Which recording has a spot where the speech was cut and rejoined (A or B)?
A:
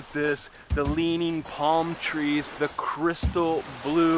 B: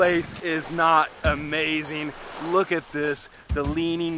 A